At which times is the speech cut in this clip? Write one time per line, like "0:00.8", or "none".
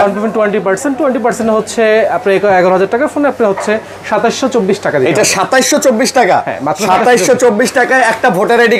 none